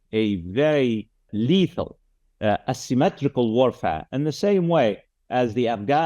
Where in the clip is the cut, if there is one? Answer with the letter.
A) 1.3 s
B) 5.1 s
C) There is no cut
A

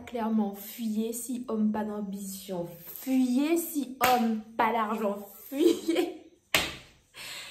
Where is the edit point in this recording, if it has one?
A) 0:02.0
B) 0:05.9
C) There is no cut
C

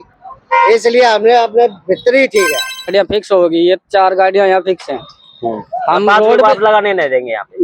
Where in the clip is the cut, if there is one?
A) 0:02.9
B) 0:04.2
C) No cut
A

